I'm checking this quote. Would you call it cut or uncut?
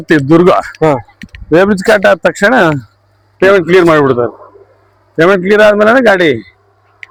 uncut